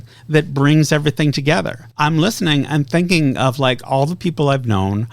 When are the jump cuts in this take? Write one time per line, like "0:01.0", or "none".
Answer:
0:01.8